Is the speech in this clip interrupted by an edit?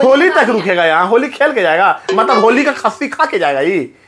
no; 0 cuts

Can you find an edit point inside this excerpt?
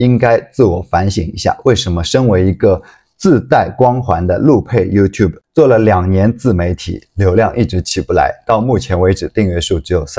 no; 0 cuts

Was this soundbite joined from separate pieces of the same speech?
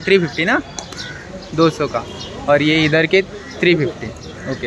no; 0 cuts

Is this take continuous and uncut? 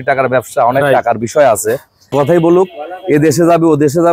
no; 1 cut; at 2.1 s

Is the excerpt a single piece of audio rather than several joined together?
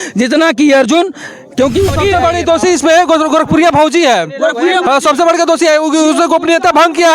no; 1 cut; at 1.9 s

